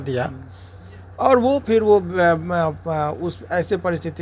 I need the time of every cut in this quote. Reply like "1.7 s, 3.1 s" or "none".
none